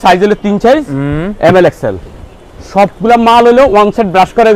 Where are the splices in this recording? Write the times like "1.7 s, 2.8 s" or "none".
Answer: none

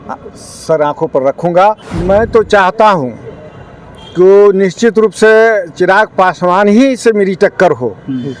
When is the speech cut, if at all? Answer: 1.9 s

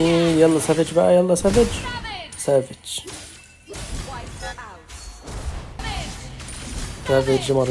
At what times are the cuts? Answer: 5.8 s

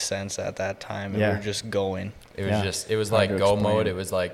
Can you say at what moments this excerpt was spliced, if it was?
none

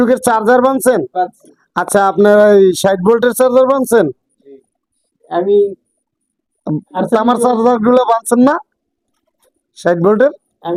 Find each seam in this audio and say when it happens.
none

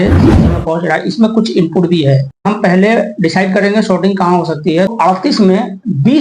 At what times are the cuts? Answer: 2.5 s, 4.9 s

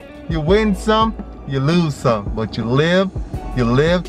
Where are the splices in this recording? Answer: none

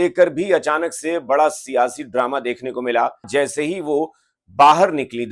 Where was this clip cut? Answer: 3.3 s

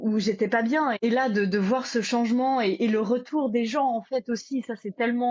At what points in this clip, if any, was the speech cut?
1.0 s

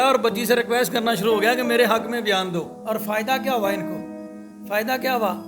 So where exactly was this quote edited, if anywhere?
2.7 s

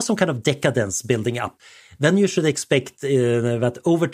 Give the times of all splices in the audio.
1.5 s

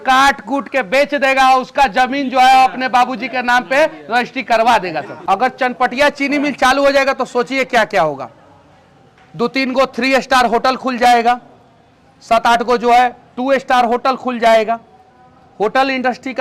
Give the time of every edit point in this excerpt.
5.1 s

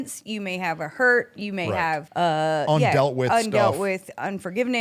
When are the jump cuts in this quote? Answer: 2.1 s

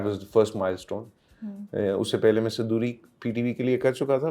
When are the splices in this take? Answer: none

